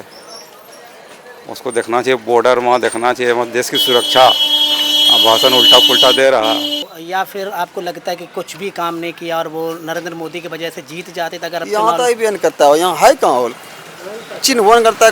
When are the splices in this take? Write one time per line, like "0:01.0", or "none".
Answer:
0:06.8

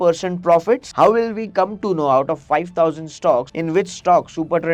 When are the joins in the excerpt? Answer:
0:00.9
0:03.5

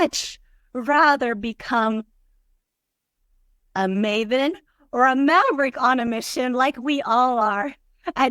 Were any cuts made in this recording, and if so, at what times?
none

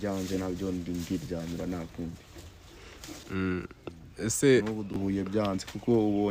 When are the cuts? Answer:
none

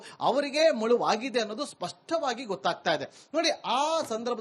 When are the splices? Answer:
none

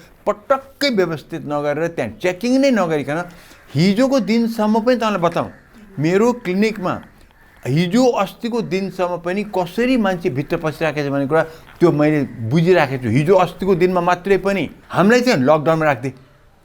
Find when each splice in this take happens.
0:14.8

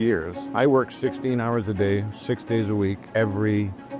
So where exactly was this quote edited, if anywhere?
none

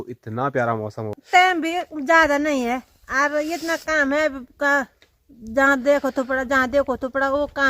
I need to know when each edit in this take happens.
0:01.1

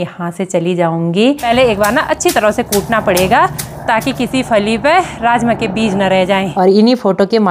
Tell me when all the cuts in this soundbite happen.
0:01.4
0:06.5

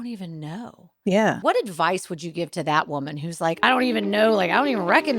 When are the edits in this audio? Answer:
0:01.4
0:03.6

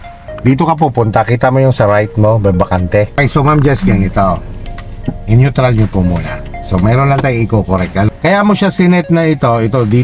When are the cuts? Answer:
0:03.2
0:08.1

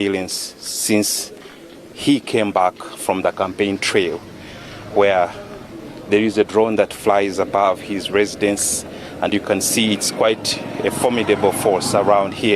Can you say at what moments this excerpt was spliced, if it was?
none

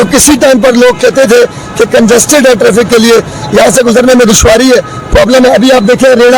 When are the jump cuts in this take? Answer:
none

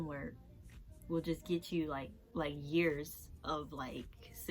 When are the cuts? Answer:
0:02.2

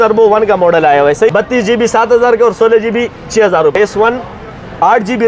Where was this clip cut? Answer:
0:01.3
0:03.7

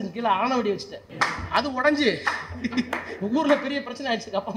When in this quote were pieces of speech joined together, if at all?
0:01.0

